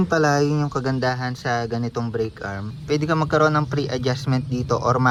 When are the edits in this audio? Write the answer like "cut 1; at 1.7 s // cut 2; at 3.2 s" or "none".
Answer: none